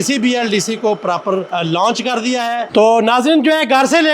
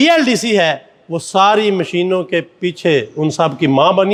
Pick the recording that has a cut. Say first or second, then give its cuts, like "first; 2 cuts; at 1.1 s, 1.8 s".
first; 2 cuts; at 1.5 s, 2.7 s